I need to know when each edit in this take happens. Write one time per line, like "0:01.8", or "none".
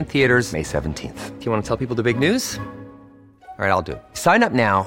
none